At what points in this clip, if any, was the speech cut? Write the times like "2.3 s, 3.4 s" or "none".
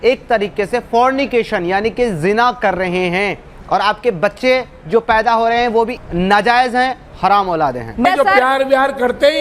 6.0 s, 8.0 s